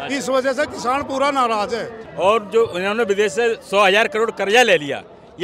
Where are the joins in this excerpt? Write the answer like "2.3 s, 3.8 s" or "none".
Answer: 2.0 s